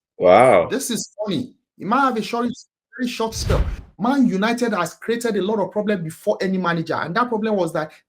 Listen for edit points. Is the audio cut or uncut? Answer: cut